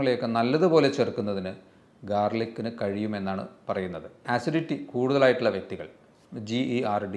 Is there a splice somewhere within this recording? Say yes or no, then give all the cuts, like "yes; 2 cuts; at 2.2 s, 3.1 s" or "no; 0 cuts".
yes; 1 cut; at 4.2 s